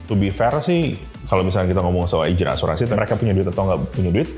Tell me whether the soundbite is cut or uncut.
cut